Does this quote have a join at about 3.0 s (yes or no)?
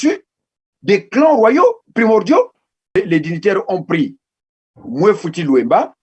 yes